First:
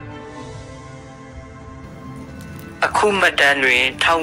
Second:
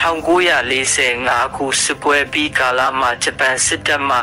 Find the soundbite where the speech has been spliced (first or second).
first